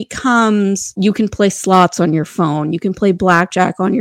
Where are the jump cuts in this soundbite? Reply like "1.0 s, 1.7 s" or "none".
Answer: 0.9 s